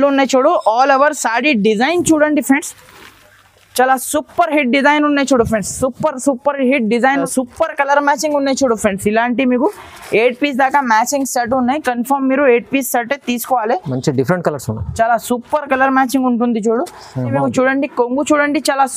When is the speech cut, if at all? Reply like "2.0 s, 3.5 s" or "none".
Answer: 7.2 s, 17.3 s